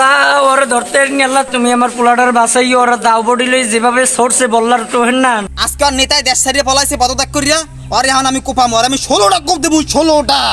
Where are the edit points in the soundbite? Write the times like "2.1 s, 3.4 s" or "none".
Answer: 5.5 s